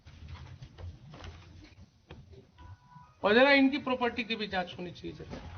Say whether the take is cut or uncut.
uncut